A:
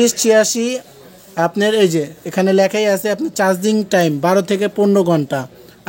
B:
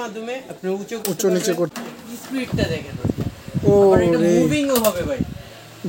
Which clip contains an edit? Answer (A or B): B